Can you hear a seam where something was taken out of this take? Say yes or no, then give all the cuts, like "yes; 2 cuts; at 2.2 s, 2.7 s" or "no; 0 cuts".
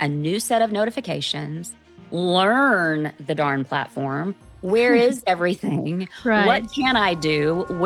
no; 0 cuts